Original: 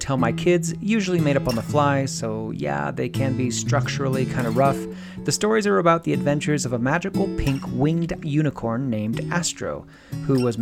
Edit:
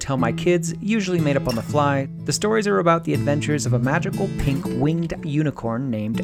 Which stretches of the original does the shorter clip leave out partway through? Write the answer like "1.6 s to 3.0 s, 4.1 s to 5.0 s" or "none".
2.1 s to 5.1 s